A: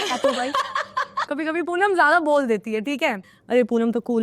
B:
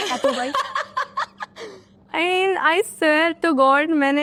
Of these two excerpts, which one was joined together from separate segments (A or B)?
A